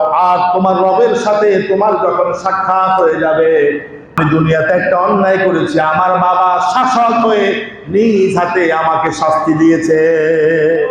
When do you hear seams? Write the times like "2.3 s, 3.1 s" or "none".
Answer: 4.1 s